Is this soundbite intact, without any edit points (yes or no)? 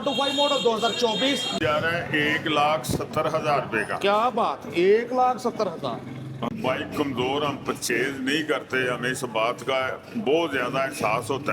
no